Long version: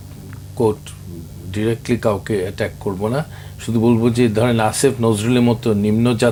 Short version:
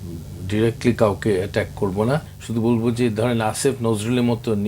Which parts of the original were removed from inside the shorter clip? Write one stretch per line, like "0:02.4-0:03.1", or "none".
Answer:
0:03.4-0:03.5